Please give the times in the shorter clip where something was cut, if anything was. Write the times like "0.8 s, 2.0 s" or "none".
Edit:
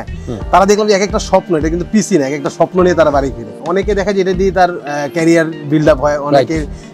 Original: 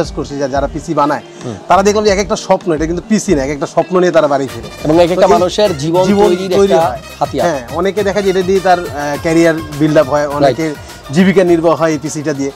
3.6 s